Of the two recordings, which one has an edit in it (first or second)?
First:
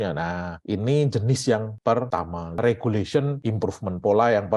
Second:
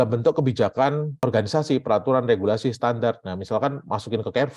first